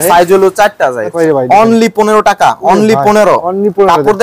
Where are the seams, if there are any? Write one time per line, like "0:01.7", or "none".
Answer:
0:01.0